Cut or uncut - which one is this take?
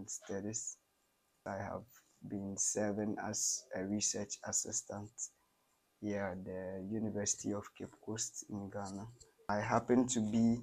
cut